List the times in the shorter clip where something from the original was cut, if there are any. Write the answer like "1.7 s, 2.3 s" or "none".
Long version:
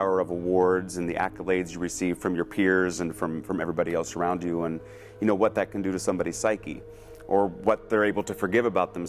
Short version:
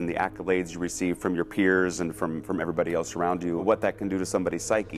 3.6 s